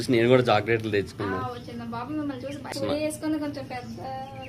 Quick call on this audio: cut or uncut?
cut